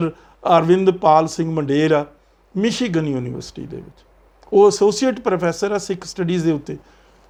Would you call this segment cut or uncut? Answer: uncut